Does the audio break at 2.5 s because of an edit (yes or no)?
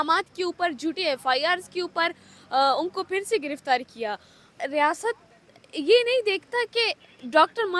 no